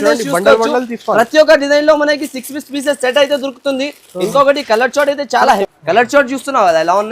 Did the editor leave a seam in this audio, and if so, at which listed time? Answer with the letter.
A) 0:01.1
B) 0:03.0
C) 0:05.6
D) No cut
C